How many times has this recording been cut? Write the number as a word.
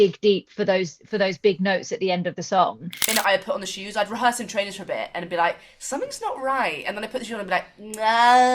one